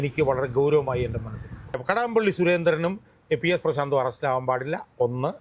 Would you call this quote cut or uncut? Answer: cut